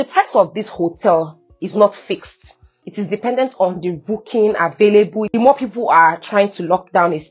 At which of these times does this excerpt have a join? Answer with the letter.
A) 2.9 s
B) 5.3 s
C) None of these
B